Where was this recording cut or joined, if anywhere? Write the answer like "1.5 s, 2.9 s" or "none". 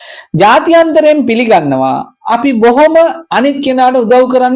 none